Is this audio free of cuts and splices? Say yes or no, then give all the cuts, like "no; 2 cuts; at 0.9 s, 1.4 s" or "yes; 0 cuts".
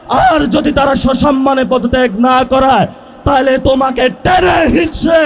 yes; 0 cuts